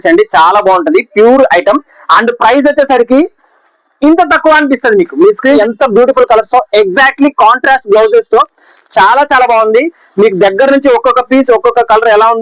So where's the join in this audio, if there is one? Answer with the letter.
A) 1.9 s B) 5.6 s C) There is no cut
B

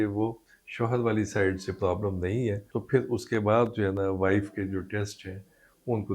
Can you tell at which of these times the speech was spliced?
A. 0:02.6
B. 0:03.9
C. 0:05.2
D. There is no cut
A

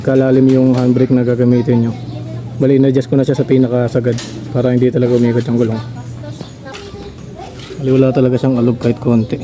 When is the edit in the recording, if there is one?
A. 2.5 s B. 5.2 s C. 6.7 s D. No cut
C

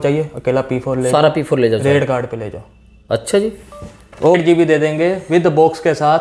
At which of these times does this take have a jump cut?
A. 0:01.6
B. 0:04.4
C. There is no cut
B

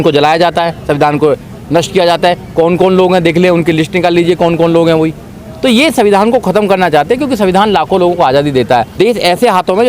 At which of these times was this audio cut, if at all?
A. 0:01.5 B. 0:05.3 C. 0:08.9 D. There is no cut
C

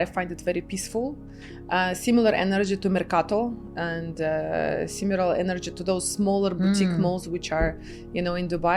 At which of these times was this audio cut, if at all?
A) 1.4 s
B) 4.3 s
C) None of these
C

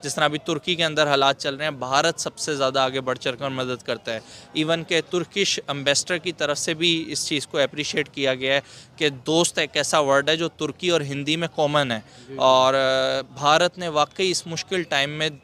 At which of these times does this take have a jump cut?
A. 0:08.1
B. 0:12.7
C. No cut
C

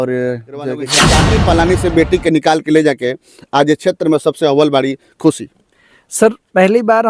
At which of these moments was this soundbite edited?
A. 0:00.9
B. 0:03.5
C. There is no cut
A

